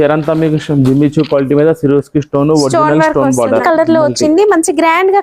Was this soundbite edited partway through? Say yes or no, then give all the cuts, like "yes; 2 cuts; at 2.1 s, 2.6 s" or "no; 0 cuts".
yes; 1 cut; at 3.6 s